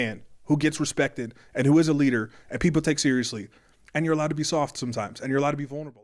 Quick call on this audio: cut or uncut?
uncut